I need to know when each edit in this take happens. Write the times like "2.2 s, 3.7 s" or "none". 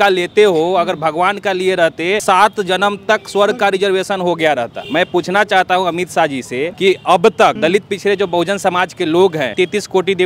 2.2 s, 4.8 s, 6.7 s, 7.6 s, 9.5 s